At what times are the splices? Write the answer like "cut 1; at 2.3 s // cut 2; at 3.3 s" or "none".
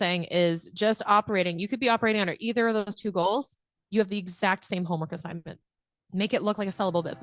cut 1; at 6.2 s